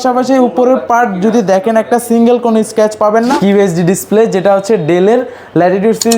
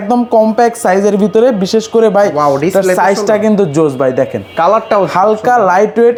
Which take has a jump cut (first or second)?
first